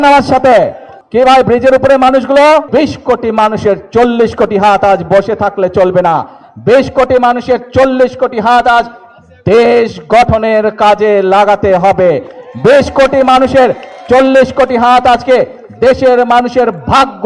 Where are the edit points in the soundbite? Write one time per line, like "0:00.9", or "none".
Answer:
0:02.7